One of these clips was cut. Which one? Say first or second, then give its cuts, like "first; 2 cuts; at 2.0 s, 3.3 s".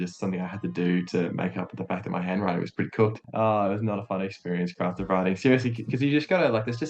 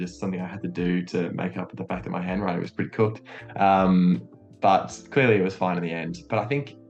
first; 1 cut; at 3.2 s